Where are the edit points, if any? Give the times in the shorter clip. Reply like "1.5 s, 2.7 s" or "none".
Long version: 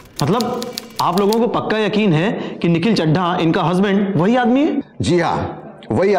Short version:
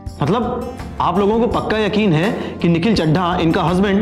none